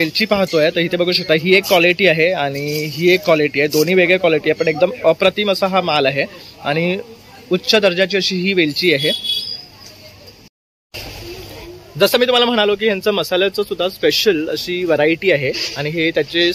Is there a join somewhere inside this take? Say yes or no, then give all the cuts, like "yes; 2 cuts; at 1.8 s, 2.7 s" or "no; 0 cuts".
no; 0 cuts